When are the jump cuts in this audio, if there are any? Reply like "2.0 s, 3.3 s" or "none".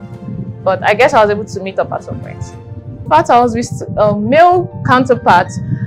3.1 s